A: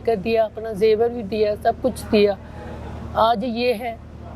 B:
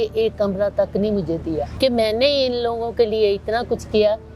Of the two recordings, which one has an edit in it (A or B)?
B